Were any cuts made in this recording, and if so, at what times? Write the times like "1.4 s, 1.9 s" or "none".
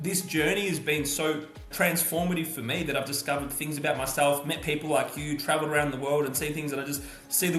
none